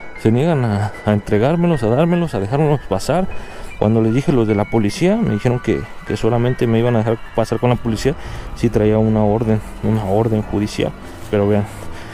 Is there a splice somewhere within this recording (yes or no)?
yes